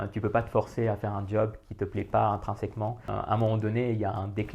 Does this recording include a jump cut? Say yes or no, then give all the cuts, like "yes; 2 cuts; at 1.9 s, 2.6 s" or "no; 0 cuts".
yes; 1 cut; at 3.1 s